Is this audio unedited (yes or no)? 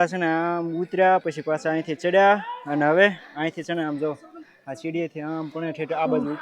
yes